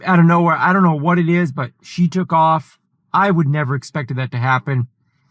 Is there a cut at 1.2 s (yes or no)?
no